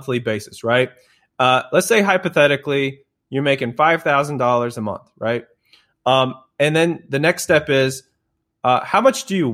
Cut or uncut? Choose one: uncut